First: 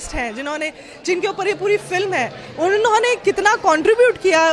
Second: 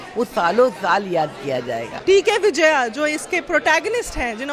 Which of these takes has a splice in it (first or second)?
second